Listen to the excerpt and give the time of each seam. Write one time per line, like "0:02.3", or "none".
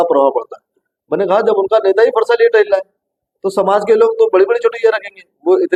none